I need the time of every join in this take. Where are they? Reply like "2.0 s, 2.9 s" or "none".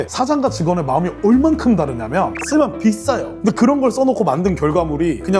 2.3 s